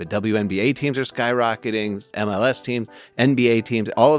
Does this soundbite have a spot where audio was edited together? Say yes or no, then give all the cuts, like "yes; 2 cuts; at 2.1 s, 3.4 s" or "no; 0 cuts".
yes; 1 cut; at 2.1 s